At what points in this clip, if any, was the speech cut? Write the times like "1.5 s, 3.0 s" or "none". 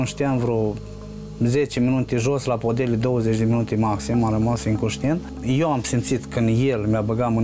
none